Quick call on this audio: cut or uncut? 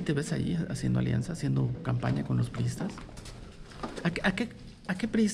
uncut